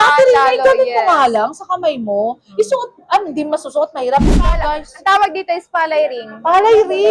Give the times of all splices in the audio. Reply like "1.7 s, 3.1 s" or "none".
4.5 s